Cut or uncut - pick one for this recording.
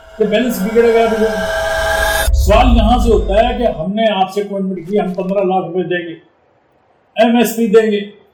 uncut